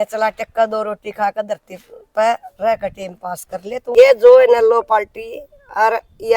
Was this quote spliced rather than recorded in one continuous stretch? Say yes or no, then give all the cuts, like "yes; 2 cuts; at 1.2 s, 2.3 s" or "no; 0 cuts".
yes; 1 cut; at 4.0 s